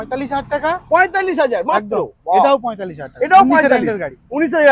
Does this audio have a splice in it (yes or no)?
no